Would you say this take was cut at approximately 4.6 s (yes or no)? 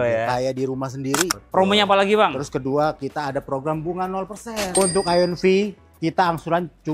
yes